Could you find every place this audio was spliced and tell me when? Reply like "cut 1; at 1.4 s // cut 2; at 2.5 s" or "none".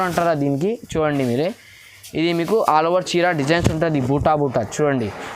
none